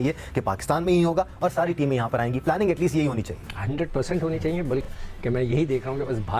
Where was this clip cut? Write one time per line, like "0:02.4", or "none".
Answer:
0:04.9